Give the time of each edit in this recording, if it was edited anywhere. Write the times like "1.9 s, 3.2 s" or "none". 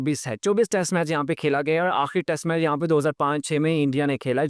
none